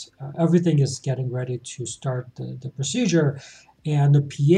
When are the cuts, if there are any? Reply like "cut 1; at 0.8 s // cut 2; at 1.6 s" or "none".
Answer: none

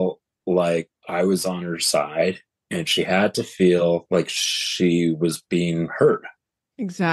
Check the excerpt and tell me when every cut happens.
cut 1; at 1.0 s // cut 2; at 4.0 s

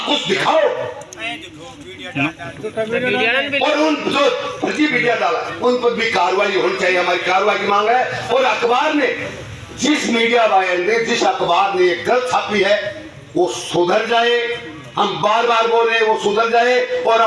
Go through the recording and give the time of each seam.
none

